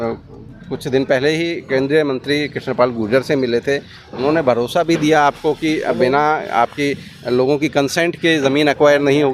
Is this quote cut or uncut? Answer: uncut